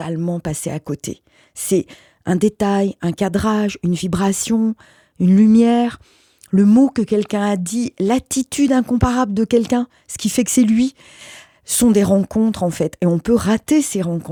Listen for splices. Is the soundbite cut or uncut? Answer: uncut